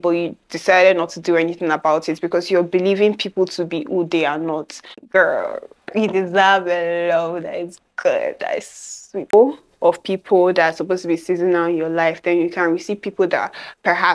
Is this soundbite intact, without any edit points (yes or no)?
no